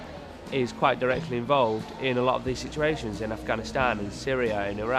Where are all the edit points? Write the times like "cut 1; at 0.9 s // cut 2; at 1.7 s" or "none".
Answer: none